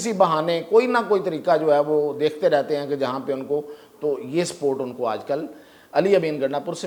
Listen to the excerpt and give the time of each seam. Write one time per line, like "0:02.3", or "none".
none

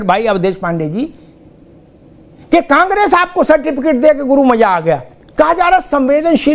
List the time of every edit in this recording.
0:05.2

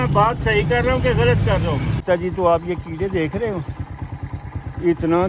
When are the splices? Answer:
0:02.0

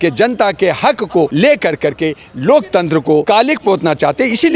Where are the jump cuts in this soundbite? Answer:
0:01.3
0:03.2

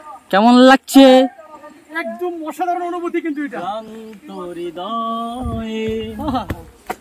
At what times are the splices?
none

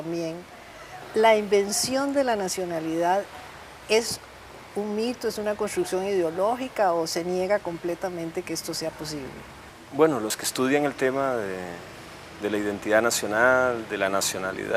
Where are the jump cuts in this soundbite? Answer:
0:08.1

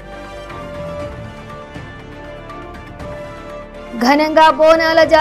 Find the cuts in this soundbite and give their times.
none

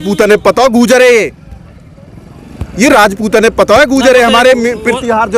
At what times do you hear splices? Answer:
none

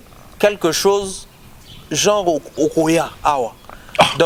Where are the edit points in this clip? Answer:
none

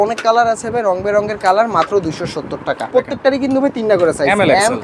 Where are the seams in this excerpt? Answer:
0:02.9

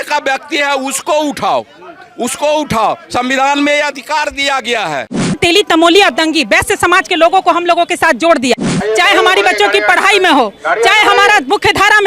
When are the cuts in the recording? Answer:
0:05.4
0:08.7

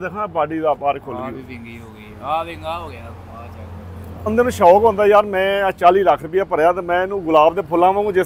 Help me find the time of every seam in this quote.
0:04.3

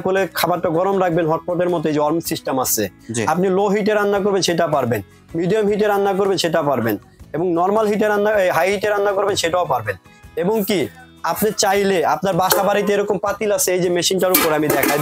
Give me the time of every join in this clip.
none

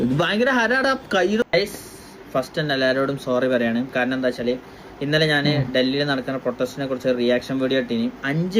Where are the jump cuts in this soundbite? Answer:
0:01.4

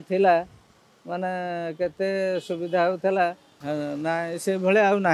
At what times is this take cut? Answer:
0:03.5

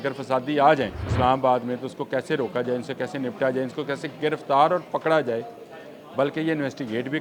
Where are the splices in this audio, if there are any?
0:01.0

